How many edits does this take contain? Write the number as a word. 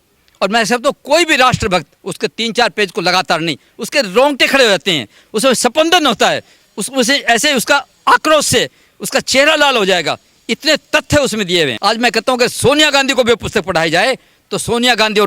one